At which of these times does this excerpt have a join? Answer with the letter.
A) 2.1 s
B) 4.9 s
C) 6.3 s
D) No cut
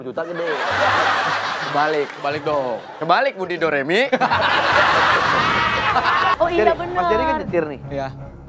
C